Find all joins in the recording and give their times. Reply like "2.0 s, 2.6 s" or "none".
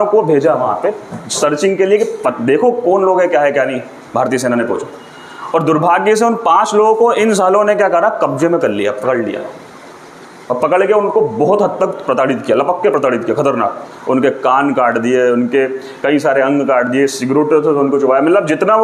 none